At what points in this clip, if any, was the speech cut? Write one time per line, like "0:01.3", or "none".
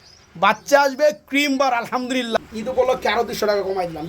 0:02.4